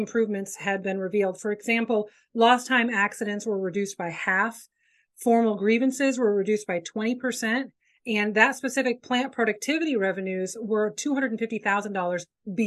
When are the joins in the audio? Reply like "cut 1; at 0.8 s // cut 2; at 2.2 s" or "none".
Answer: none